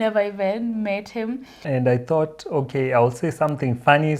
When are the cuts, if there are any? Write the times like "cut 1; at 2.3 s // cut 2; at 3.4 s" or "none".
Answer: cut 1; at 1.6 s